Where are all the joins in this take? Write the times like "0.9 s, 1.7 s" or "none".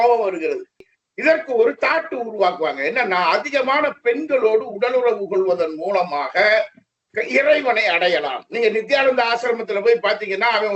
1.0 s